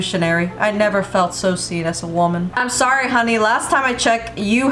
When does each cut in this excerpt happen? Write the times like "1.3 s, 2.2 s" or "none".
2.5 s